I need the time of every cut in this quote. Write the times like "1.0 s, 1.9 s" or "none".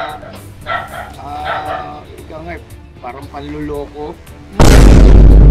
none